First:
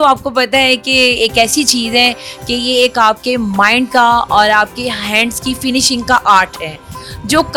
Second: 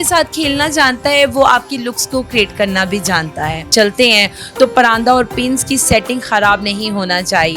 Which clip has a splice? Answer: second; 1 cut; at 3.7 s

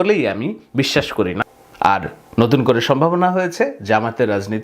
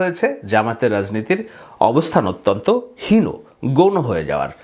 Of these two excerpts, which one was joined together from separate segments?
first; 1 cut; at 1.4 s

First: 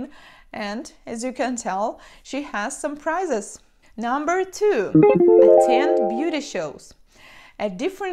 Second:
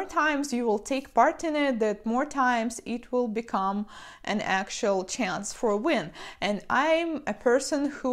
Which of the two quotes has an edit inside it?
second; 1 cut; at 1.1 s

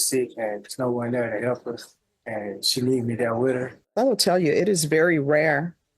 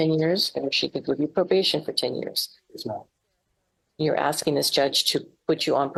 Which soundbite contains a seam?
first; 1 cut; at 3.8 s

